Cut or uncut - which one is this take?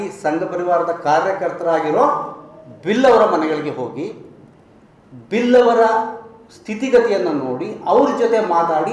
uncut